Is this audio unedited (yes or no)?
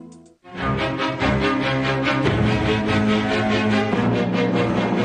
yes